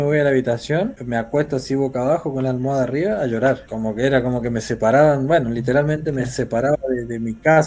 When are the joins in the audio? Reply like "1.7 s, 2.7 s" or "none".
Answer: 1.0 s, 3.7 s